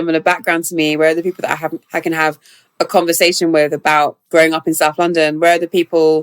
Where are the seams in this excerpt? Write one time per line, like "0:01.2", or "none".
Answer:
0:04.2